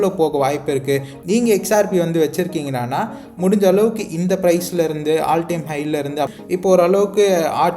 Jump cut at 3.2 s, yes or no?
no